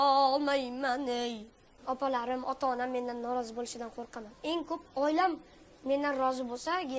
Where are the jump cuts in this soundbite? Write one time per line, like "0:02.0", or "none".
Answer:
0:01.7